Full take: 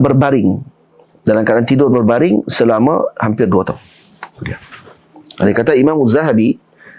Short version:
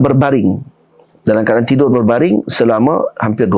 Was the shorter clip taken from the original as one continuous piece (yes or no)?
yes